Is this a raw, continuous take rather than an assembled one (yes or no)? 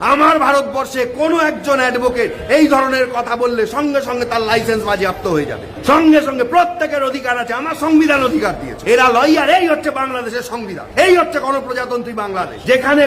yes